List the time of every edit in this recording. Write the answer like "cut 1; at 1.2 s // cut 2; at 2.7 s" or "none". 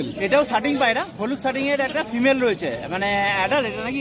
none